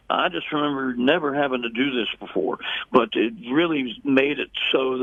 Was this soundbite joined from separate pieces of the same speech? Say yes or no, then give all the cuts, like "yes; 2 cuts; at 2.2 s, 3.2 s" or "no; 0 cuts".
no; 0 cuts